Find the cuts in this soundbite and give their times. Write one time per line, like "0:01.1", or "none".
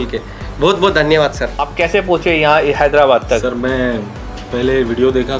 0:01.6